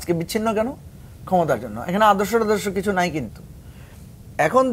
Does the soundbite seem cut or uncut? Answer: uncut